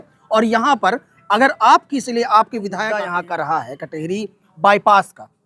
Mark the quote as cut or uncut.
cut